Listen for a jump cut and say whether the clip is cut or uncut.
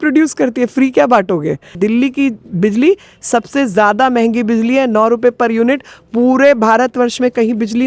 cut